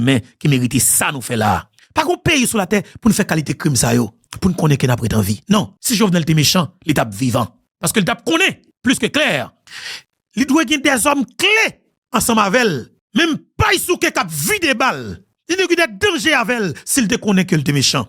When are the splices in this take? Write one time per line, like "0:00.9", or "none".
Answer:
0:05.8